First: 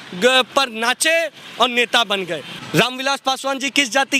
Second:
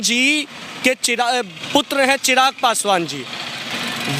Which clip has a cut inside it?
first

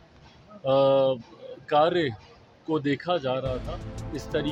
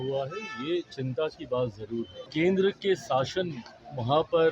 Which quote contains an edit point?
second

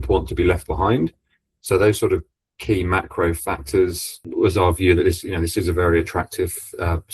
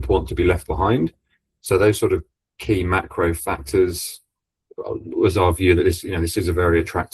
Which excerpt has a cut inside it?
first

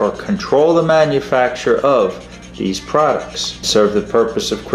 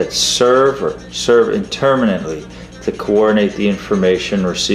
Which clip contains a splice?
first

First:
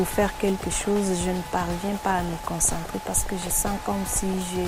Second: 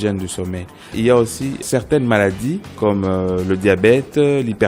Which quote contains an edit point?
second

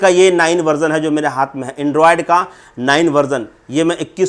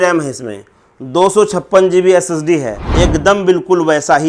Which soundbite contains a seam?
second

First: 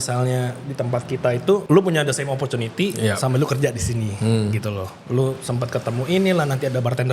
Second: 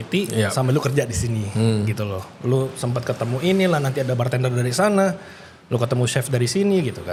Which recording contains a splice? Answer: first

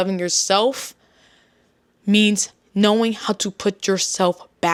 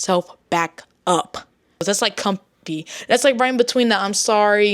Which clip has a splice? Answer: second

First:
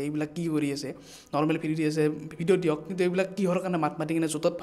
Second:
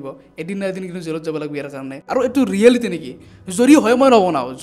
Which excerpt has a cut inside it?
second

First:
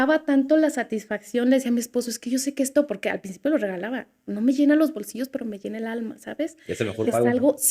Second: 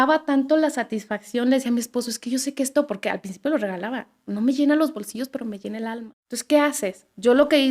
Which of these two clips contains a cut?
second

